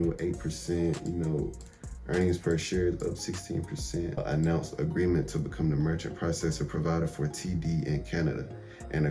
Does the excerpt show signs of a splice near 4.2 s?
yes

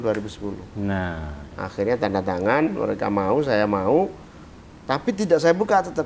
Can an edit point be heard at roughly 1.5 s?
no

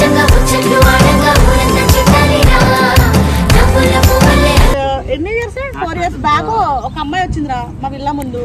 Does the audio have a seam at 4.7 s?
yes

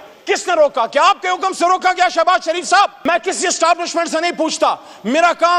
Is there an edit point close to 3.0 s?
yes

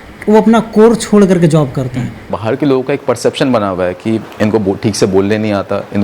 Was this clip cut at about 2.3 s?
yes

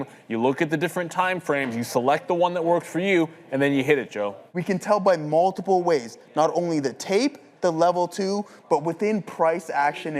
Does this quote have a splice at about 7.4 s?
no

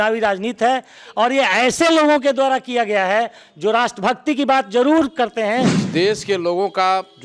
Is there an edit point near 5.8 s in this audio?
yes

